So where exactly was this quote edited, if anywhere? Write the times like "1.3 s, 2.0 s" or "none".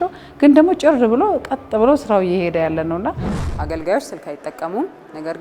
3.3 s